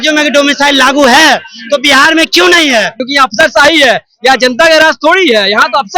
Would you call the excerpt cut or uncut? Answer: cut